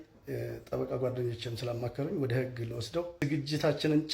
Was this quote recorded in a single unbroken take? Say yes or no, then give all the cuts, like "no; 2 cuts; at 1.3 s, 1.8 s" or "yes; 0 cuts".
no; 1 cut; at 3.2 s